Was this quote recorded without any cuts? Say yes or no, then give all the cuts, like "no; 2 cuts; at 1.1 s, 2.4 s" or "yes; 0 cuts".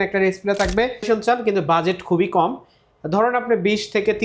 no; 1 cut; at 1.0 s